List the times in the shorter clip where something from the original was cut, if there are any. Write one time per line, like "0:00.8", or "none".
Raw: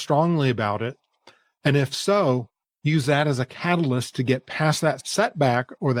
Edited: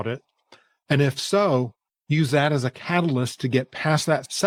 none